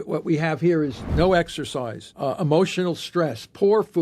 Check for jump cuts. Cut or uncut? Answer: cut